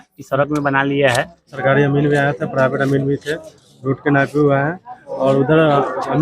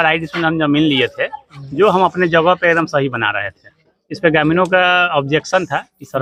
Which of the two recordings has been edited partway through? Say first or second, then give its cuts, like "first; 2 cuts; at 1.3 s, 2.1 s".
first; 1 cut; at 1.5 s